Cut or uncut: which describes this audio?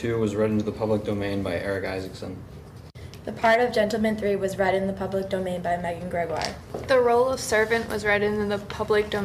cut